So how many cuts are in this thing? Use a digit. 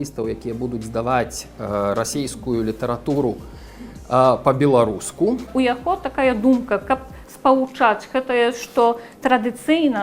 1